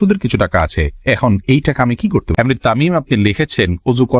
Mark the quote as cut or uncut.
cut